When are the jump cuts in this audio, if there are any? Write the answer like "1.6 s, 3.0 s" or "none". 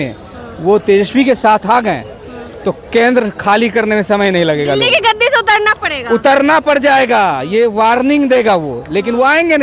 none